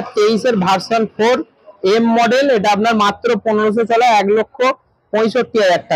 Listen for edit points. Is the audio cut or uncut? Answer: uncut